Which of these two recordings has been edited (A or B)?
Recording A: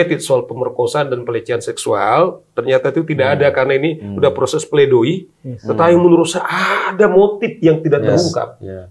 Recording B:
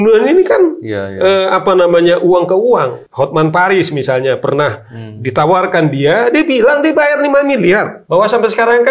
B